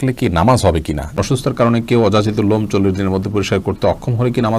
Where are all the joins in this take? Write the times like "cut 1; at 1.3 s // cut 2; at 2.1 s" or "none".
cut 1; at 1.2 s